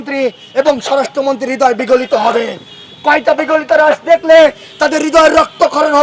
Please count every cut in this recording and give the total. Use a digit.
0